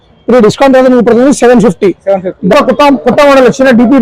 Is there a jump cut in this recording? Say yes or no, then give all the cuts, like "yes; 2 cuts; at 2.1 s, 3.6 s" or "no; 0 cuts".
yes; 1 cut; at 2.5 s